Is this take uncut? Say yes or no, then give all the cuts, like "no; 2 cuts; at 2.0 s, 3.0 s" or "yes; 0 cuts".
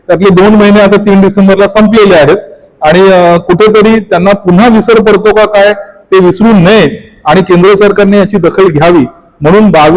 yes; 0 cuts